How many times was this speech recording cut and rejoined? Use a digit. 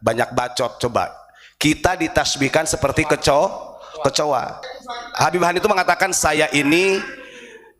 1